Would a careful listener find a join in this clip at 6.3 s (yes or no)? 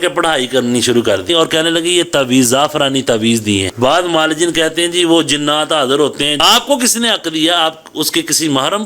yes